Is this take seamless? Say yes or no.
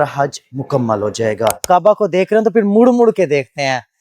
no